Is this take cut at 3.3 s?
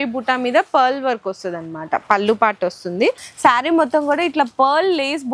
yes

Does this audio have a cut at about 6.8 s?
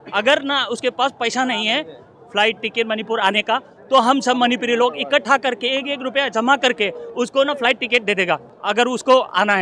no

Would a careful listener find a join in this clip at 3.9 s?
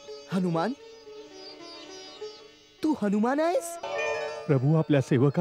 yes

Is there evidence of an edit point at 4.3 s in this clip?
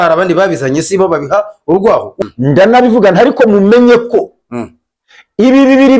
no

